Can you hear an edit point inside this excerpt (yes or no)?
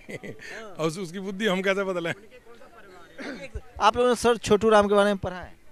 no